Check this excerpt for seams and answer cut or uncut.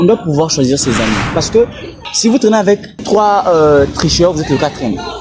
cut